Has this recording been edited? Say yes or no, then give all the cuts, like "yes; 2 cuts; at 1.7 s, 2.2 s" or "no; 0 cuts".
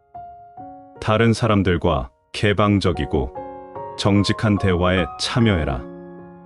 yes; 2 cuts; at 0.9 s, 5.8 s